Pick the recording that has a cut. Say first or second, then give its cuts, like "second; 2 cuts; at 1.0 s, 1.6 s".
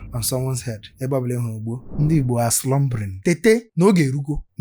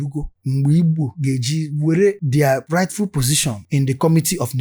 first; 2 cuts; at 1.9 s, 3.1 s